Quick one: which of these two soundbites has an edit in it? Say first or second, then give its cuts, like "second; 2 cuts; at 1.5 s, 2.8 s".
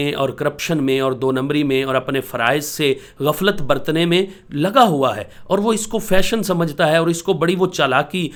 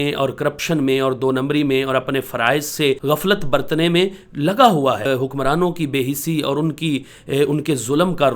second; 2 cuts; at 3.0 s, 5.1 s